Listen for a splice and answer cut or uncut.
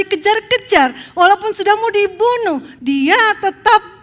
cut